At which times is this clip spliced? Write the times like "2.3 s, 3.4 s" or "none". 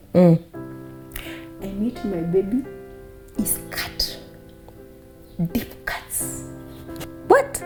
none